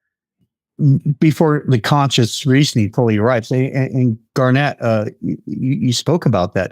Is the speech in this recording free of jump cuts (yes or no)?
yes